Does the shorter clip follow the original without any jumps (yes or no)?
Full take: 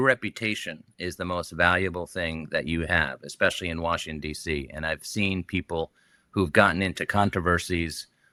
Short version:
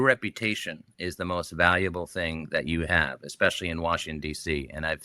yes